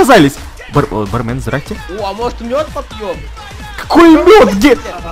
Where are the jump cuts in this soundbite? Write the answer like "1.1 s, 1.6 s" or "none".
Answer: 1.8 s